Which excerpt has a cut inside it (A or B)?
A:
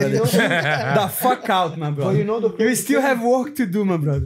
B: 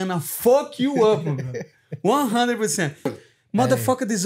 B